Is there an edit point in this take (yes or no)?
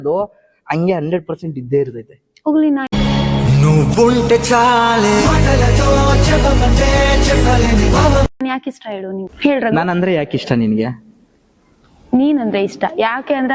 yes